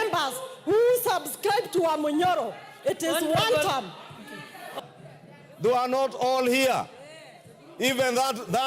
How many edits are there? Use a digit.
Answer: 1